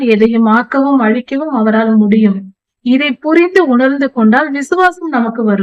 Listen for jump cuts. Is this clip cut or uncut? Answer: uncut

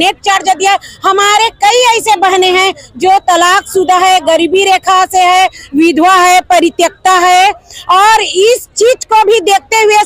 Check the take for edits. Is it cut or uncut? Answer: uncut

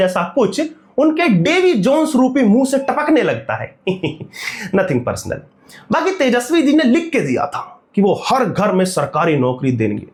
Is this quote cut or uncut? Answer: uncut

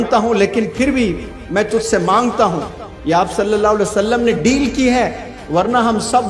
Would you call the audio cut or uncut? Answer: uncut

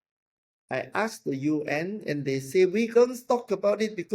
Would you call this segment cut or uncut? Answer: cut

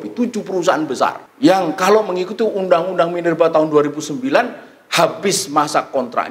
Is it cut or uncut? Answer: cut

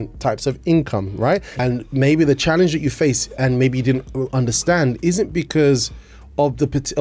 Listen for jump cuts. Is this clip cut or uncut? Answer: cut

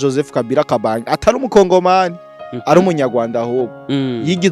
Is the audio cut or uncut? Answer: uncut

